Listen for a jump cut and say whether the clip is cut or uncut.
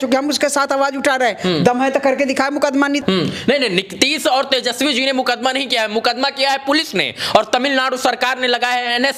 uncut